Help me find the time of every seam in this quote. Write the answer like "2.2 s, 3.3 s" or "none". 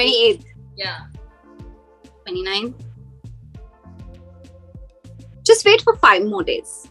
1.0 s, 2.2 s